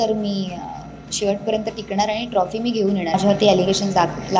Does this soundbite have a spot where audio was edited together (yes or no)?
yes